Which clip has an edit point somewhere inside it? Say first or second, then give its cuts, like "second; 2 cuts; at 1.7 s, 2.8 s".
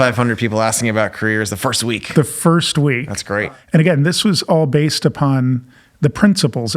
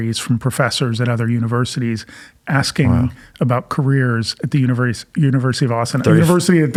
first; 1 cut; at 3.3 s